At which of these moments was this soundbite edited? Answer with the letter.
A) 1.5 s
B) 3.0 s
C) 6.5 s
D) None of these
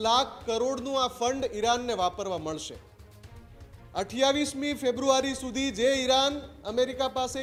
D